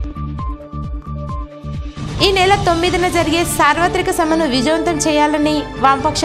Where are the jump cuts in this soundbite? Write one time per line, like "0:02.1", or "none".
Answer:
0:01.7